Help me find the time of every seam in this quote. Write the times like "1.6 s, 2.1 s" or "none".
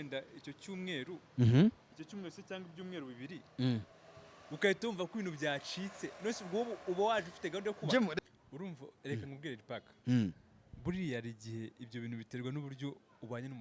8.1 s